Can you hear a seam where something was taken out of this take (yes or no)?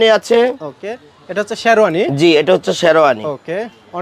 no